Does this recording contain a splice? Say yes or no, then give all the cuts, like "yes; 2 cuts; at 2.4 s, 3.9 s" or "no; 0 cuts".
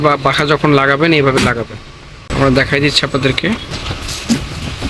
yes; 1 cut; at 2.2 s